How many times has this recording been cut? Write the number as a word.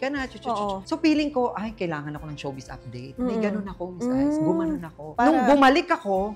zero